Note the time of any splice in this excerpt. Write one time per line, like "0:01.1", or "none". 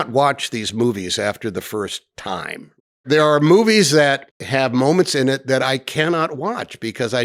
0:03.0
0:04.3